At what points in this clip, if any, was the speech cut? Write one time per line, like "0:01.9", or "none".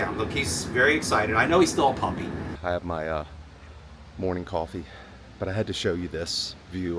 0:02.5